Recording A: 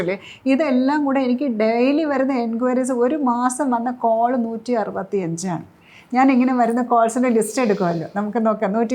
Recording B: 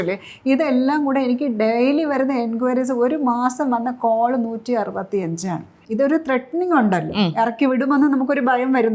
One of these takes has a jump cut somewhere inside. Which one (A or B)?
B